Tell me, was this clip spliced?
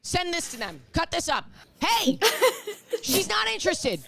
yes; 1 cut; at 1.6 s

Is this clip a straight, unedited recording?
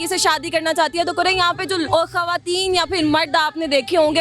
no; 1 cut; at 1.9 s

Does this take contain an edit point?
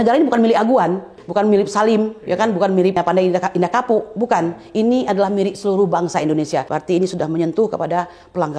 yes; 3 cuts; at 1.2 s, 3.0 s, 6.7 s

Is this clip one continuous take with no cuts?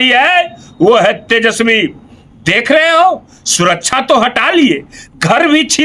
yes; 0 cuts

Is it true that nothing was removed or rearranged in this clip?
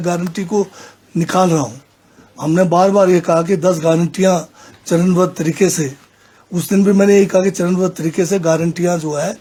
yes; 0 cuts

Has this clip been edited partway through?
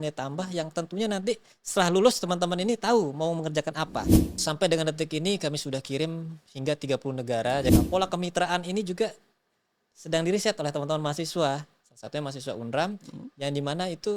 yes; 2 cuts; at 4.2 s, 7.7 s

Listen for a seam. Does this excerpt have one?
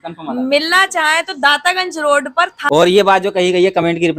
yes; 1 cut; at 2.6 s

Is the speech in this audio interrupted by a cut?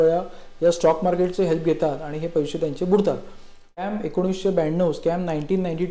yes; 1 cut; at 3.9 s

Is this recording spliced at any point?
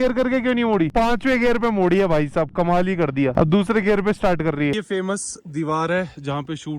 yes; 1 cut; at 4.7 s

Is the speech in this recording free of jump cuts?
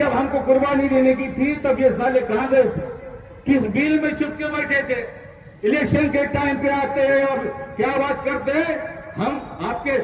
yes; 0 cuts

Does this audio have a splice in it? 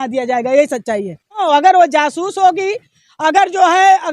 yes; 1 cut; at 1.4 s

